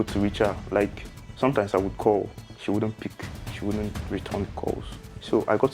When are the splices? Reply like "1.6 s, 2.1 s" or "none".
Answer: 2.4 s